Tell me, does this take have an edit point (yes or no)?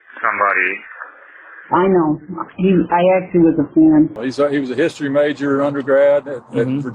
yes